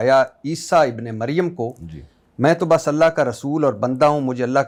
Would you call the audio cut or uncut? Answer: uncut